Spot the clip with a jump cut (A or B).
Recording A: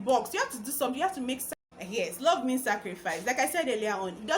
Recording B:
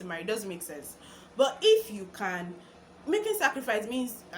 A